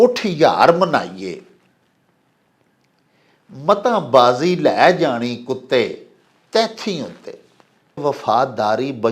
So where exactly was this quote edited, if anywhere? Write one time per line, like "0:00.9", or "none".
0:08.0

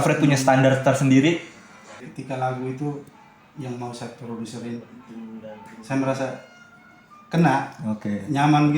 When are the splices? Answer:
0:02.1

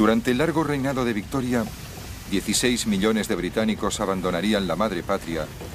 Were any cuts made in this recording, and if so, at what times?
none

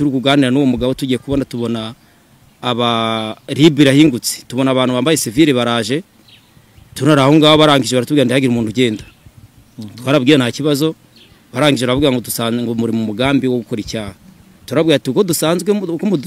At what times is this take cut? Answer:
none

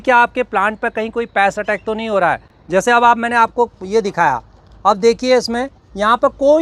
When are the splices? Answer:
none

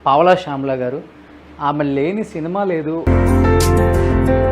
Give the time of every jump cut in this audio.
0:03.0

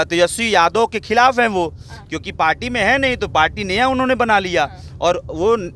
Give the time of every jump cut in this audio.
none

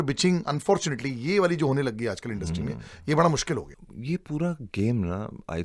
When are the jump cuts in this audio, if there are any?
none

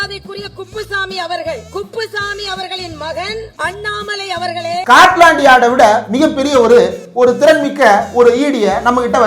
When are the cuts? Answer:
0:04.8

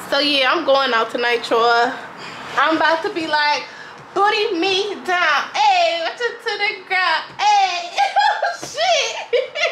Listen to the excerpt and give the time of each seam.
none

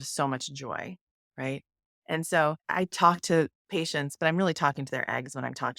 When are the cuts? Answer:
0:02.6

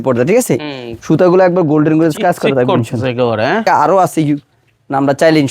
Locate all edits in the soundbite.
0:03.7

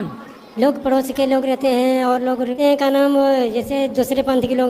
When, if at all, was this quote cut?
0:03.0

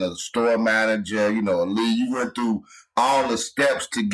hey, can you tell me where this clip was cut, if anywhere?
none

